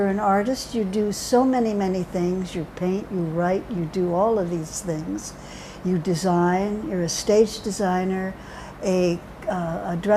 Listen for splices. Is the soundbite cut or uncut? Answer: cut